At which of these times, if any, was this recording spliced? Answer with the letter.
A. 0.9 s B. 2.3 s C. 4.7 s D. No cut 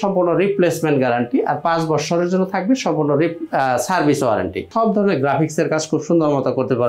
C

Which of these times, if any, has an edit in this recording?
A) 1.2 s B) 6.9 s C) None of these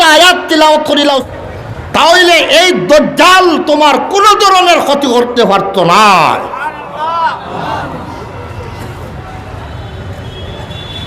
A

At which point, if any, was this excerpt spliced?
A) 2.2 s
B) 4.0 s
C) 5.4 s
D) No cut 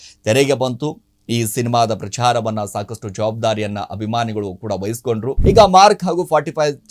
C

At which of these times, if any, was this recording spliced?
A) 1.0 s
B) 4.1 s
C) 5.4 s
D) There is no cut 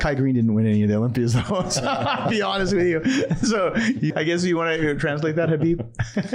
B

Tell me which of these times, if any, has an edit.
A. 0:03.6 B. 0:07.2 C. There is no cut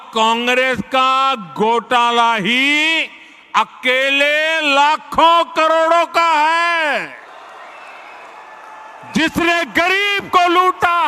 B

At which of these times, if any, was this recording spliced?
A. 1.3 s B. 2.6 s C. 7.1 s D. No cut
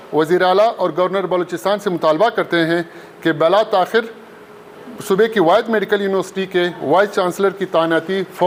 D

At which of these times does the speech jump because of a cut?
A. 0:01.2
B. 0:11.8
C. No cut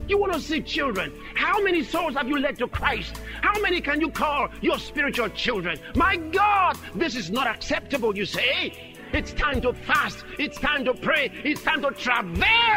A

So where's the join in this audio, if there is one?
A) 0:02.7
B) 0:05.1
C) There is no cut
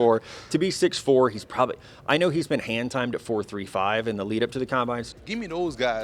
B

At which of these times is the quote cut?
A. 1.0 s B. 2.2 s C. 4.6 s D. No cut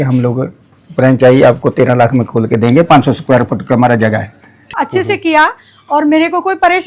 C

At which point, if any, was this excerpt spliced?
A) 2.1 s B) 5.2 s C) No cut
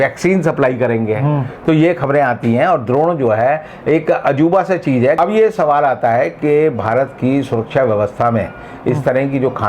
B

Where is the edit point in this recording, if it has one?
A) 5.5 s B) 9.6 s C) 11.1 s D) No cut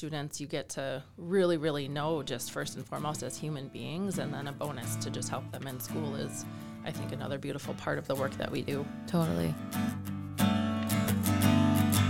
B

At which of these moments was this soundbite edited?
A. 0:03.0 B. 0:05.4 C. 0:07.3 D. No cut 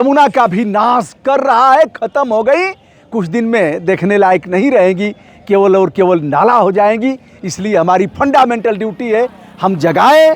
D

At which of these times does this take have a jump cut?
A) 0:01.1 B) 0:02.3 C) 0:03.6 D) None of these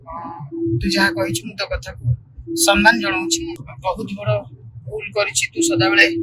C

